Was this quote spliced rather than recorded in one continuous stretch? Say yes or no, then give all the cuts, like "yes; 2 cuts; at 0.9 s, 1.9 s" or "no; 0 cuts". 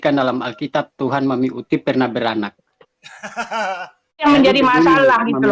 yes; 1 cut; at 4.2 s